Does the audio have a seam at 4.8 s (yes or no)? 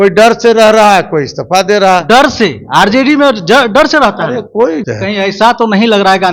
yes